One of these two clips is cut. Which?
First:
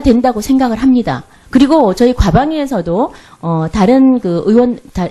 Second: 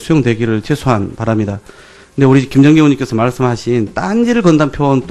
first; 1 cut; at 2.1 s

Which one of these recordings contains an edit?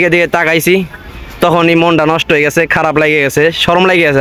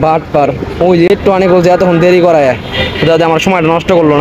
second; 1 cut; at 1.1 s

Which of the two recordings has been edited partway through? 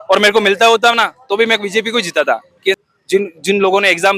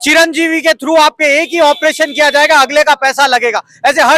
first; 1 cut; at 2.8 s

